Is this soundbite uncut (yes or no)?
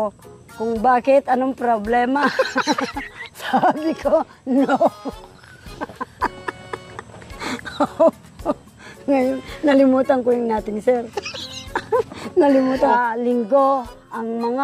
no